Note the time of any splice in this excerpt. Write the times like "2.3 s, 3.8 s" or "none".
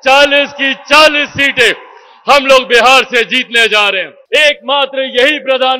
4.1 s

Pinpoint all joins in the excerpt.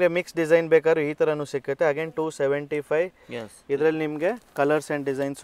none

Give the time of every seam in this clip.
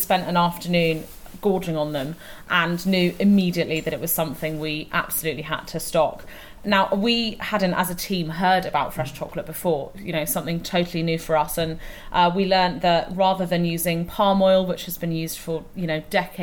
none

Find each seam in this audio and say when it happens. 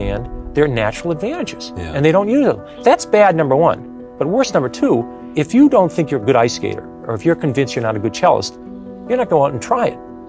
2.7 s, 5.2 s

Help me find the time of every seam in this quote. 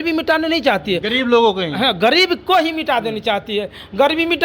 none

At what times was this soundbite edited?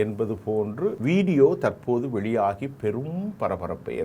1.0 s

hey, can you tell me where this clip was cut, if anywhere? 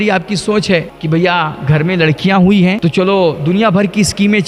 0.9 s, 2.8 s

